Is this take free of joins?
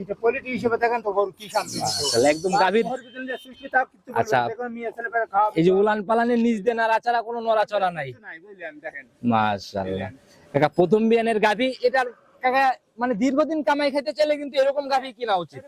yes; 0 cuts

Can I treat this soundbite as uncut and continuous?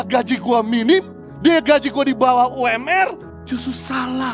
no; 2 cuts; at 1.2 s, 3.3 s

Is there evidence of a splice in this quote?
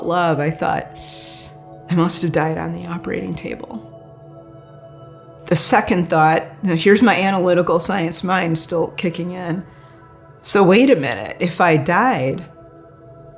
yes; 1 cut; at 12.5 s

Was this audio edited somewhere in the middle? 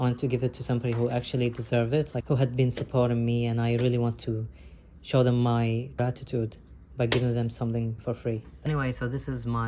yes; 1 cut; at 8.7 s

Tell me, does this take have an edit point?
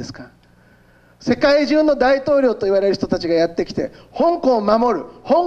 no; 0 cuts

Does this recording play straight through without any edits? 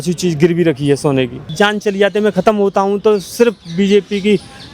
no; 1 cut; at 1.5 s

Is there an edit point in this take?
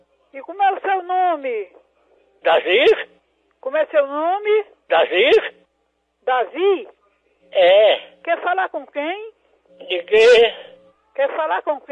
no; 0 cuts

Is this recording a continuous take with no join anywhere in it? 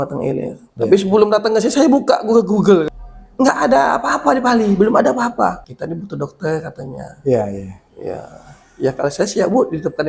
no; 2 cuts; at 3.0 s, 5.7 s

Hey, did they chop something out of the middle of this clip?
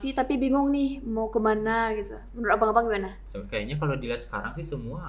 yes; 1 cut; at 3.3 s

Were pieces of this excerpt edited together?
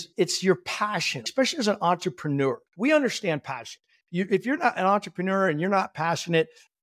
yes; 2 cuts; at 1.3 s, 2.7 s

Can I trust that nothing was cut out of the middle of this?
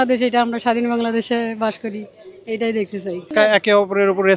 no; 1 cut; at 3.2 s

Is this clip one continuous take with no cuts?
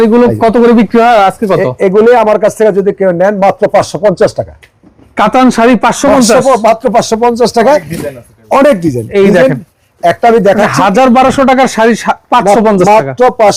yes; 0 cuts

